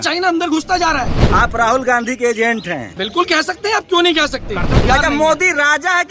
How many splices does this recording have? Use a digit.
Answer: 3